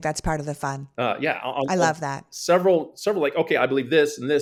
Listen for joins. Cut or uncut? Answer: uncut